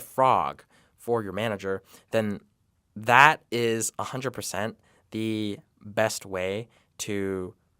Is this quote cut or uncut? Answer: uncut